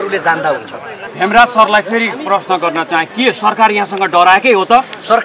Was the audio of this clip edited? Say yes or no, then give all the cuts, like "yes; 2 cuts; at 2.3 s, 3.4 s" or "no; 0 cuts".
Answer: no; 0 cuts